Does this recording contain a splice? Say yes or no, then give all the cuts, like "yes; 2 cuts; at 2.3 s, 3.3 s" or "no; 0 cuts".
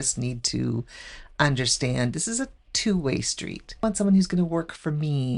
yes; 1 cut; at 3.8 s